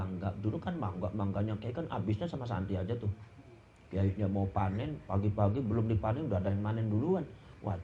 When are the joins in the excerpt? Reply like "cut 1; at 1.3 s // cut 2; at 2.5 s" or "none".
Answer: none